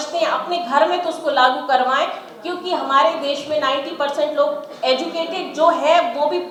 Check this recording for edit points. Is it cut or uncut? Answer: uncut